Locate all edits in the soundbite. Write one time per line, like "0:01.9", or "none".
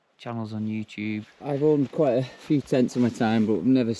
0:01.3